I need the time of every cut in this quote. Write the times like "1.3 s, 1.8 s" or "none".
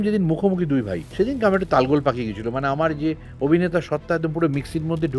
1.0 s